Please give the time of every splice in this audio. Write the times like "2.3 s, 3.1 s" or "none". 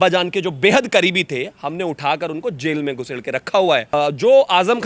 4.0 s